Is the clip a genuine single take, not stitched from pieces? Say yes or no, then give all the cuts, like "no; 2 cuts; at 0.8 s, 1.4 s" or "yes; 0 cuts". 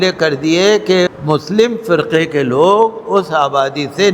no; 1 cut; at 1.1 s